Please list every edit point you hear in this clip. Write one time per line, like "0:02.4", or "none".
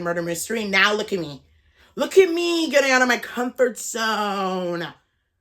none

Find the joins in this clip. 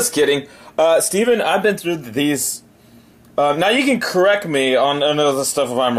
0:02.5

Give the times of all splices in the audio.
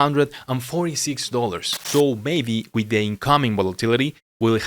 0:01.7

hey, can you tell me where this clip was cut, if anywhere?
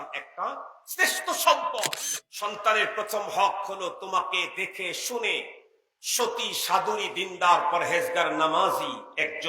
0:02.0

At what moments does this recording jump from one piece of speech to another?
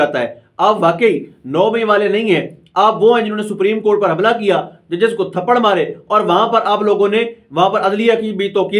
none

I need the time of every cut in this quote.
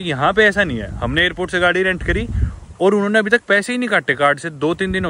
none

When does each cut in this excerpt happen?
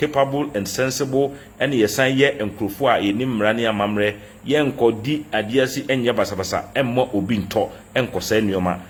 none

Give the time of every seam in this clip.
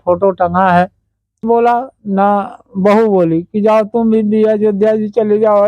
0:01.4

